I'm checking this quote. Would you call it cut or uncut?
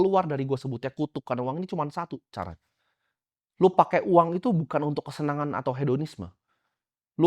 uncut